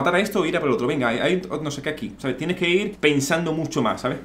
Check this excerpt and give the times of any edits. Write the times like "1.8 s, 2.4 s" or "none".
2.9 s